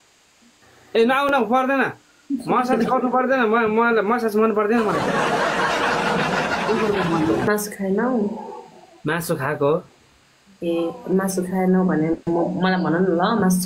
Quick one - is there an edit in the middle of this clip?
yes; 1 cut; at 7.5 s

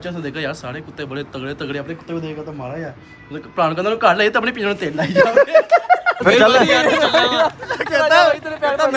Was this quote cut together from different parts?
yes; 1 cut; at 6.1 s

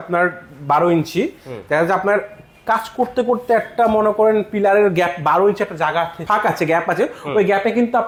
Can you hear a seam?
no; 0 cuts

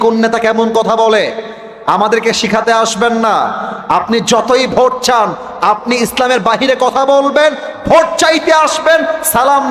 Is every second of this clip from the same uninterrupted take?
yes; 0 cuts

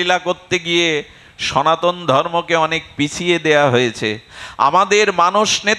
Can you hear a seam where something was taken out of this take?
no; 0 cuts

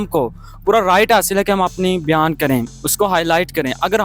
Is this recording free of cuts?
no; 1 cut; at 2.8 s

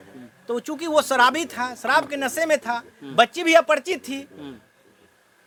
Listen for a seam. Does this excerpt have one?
no; 0 cuts

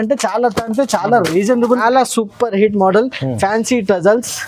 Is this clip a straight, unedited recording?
no; 1 cut; at 1.8 s

